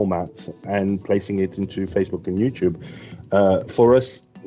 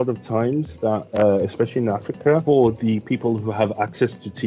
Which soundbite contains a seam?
second; 1 cut; at 2.4 s

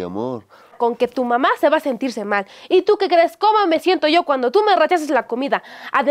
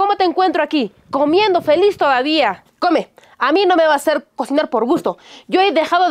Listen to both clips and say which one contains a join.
second; 1 cut; at 2.6 s

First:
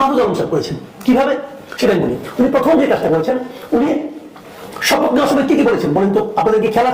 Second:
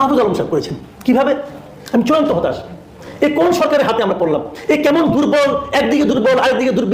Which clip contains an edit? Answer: second; 1 cut; at 1.6 s

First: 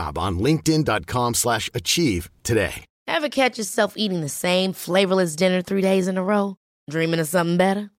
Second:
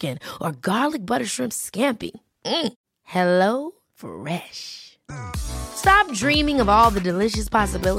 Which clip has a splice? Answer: first; 1 cut; at 2.9 s

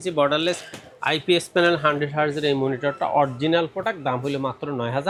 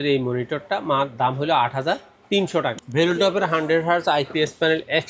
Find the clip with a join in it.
second; 1 cut; at 2.7 s

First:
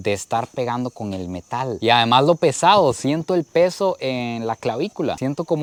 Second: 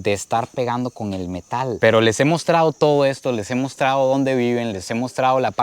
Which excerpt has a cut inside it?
second; 1 cut; at 1.8 s

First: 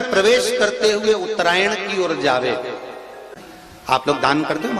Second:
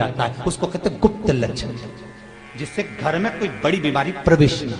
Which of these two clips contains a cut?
first; 1 cut; at 3.3 s

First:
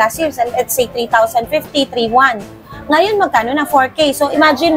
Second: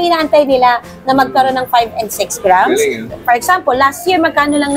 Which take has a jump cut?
second; 1 cut; at 3.1 s

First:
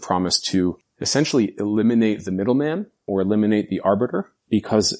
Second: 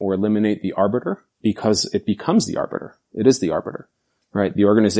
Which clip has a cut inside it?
first; 1 cut; at 0.9 s

